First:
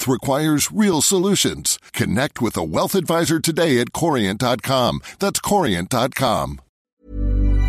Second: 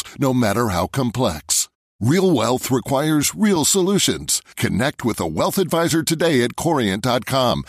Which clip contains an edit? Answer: first; 1 cut; at 6.7 s

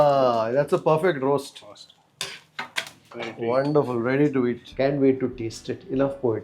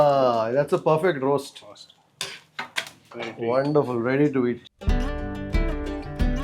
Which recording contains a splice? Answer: first; 1 cut; at 4.7 s

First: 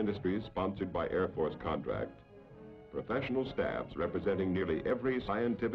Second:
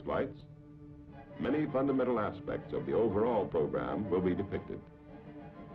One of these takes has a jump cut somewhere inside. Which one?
first; 1 cut; at 2.8 s

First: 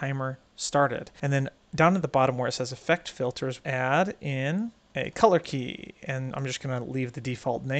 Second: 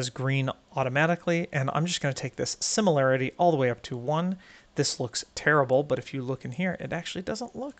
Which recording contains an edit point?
first; 3 cuts; at 1.1 s, 3.6 s, 4.8 s

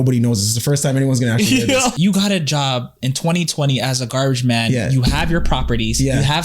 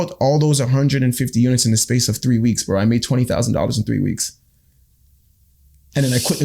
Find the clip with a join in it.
first; 1 cut; at 1.9 s

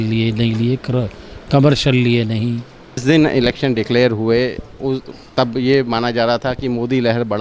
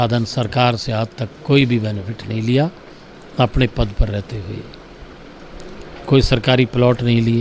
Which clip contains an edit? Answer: first; 1 cut; at 3.0 s

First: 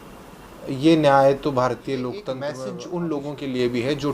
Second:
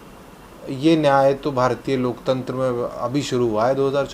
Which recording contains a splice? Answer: first; 1 cut; at 2.6 s

